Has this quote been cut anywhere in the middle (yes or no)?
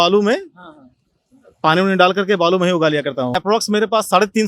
yes